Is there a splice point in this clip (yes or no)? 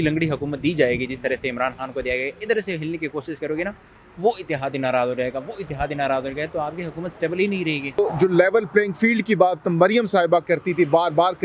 yes